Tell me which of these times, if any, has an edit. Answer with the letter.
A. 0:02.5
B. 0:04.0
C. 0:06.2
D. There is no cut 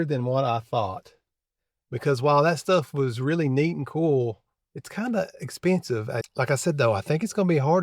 C